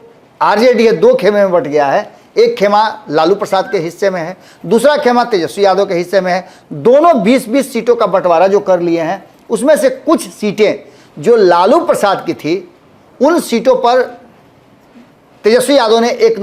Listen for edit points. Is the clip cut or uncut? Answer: uncut